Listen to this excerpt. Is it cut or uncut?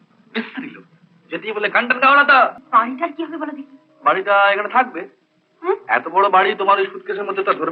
cut